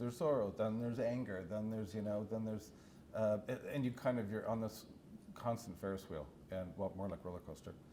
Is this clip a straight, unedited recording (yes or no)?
yes